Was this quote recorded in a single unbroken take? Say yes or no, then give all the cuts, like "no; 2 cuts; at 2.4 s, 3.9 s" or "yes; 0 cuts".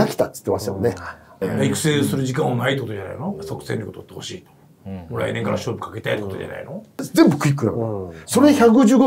no; 2 cuts; at 1.4 s, 7.0 s